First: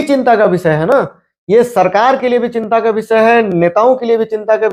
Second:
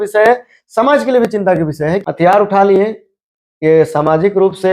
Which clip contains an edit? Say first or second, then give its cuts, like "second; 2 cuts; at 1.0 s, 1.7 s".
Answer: second; 1 cut; at 2.0 s